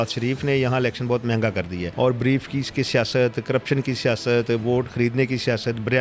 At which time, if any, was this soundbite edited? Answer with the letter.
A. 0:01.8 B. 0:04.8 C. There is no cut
A